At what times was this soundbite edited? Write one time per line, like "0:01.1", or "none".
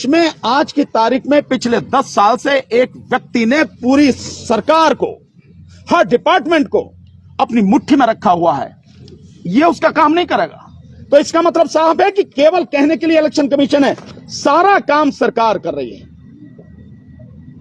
none